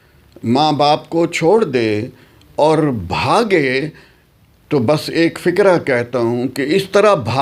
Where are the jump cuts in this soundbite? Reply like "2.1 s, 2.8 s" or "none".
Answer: none